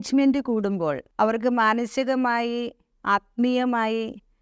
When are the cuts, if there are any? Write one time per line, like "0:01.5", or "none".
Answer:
0:01.0